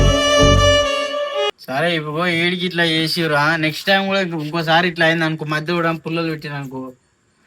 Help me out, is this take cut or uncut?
cut